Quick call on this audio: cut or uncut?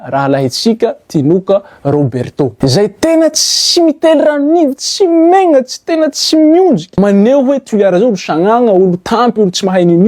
cut